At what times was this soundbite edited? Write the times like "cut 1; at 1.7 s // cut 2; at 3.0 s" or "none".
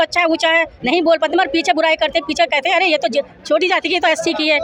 none